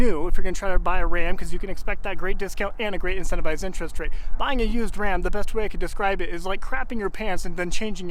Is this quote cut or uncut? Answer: uncut